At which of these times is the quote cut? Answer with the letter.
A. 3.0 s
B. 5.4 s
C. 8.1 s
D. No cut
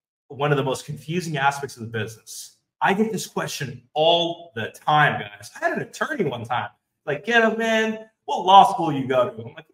D